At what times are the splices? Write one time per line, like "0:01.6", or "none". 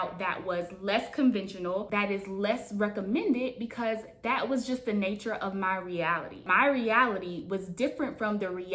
0:06.4